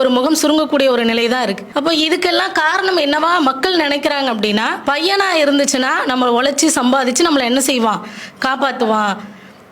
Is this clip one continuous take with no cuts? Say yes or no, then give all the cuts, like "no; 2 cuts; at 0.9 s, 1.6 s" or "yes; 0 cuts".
no; 2 cuts; at 1.6 s, 4.7 s